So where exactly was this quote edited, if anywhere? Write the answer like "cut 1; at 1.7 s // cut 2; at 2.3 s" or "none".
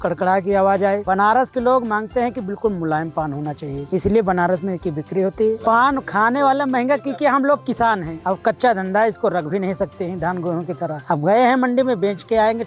cut 1; at 1.0 s // cut 2; at 3.7 s // cut 3; at 5.6 s // cut 4; at 8.1 s // cut 5; at 11.0 s